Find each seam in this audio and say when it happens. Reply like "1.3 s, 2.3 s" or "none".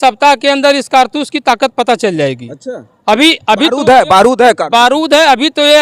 none